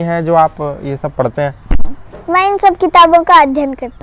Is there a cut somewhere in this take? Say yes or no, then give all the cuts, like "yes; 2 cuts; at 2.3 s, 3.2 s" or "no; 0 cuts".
no; 0 cuts